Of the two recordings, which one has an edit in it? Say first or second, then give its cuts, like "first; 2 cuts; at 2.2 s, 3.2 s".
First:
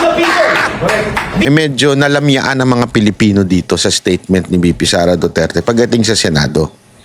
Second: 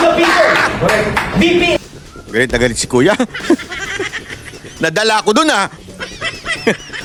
first; 1 cut; at 1.5 s